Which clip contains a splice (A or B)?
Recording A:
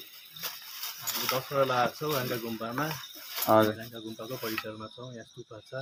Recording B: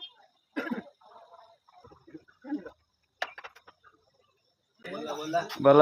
B